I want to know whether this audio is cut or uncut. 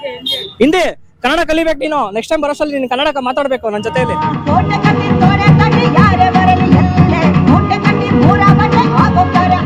uncut